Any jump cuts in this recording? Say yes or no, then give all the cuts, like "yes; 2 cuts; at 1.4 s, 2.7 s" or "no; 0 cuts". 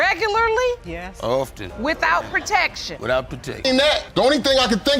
yes; 1 cut; at 3.6 s